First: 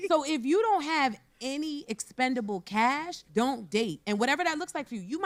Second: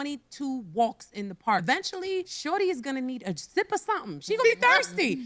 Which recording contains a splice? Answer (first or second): second